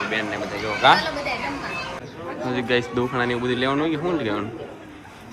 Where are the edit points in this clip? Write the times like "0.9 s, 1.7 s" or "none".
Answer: 1.9 s